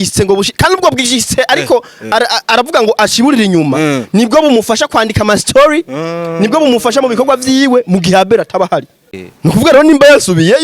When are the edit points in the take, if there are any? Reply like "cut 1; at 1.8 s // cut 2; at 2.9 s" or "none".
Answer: cut 1; at 9.1 s